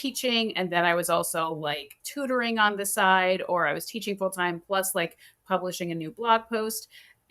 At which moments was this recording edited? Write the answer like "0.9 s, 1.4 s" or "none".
none